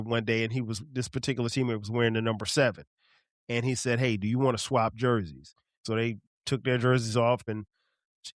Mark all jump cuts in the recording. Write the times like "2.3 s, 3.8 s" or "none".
5.8 s, 7.4 s